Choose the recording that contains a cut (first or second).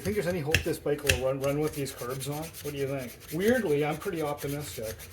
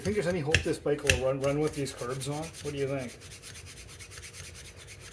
first